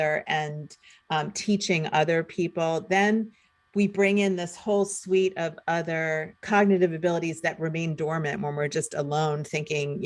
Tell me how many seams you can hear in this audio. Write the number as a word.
one